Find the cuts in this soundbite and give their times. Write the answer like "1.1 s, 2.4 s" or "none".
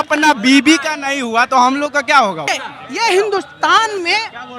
2.5 s